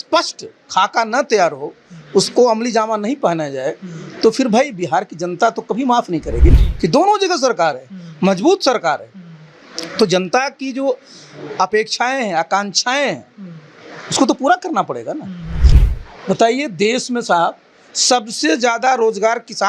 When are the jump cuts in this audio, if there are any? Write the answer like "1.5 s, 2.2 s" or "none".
6.6 s, 15.6 s